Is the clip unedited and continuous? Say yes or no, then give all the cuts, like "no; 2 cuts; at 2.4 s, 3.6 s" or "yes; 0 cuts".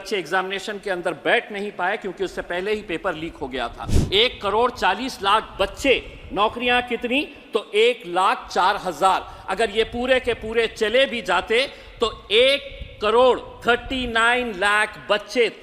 no; 1 cut; at 3.9 s